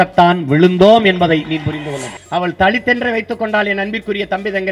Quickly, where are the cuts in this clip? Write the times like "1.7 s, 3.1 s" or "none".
2.2 s